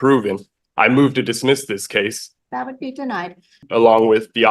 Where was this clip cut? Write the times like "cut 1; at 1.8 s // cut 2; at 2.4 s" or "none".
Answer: cut 1; at 2.3 s // cut 2; at 3.6 s